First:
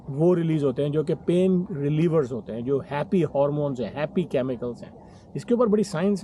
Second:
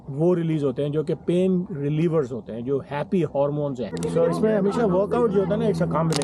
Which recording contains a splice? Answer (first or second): second